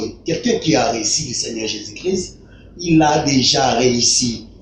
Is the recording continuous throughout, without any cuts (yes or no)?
yes